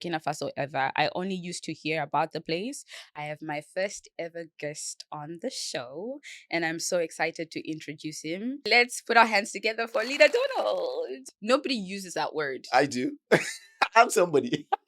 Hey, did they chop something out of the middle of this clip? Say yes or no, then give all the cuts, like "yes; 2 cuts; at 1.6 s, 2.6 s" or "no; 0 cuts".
yes; 3 cuts; at 3.1 s, 8.7 s, 11.2 s